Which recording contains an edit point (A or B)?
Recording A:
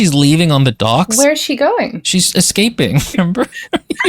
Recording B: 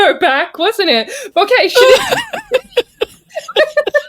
A